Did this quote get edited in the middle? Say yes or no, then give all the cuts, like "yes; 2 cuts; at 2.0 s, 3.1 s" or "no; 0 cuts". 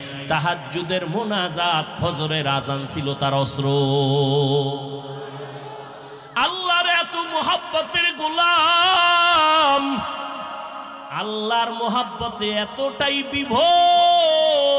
no; 0 cuts